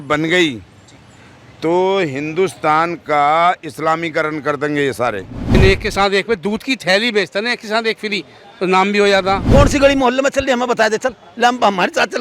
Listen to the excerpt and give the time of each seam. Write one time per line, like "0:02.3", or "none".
0:05.5
0:09.4